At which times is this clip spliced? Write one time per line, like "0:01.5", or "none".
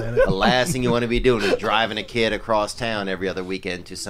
none